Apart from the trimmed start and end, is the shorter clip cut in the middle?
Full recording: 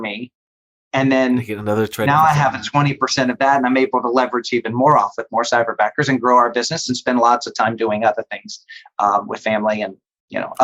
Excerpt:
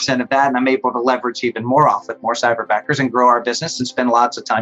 no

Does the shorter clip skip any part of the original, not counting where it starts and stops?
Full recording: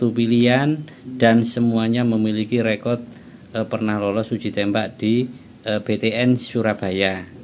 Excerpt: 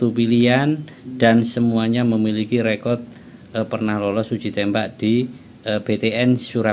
no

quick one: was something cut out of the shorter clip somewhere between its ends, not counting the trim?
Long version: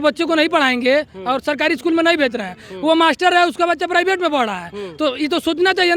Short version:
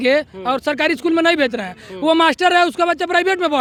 no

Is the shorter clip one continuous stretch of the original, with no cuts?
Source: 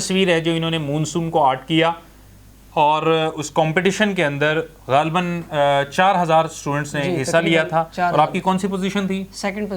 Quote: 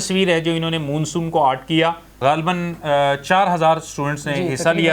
no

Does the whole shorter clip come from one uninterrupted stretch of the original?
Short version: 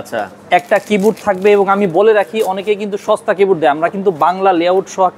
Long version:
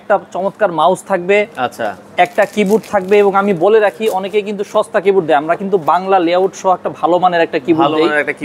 yes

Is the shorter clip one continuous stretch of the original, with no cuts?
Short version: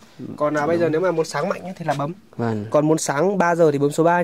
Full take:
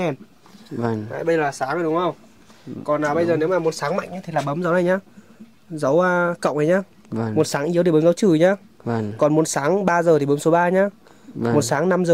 no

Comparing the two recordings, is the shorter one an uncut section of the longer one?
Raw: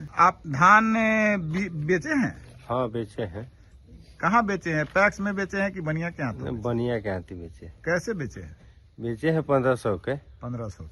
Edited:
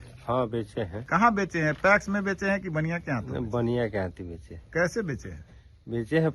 no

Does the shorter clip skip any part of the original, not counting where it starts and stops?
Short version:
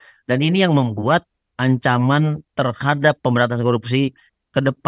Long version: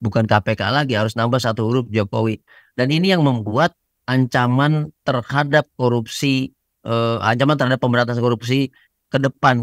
yes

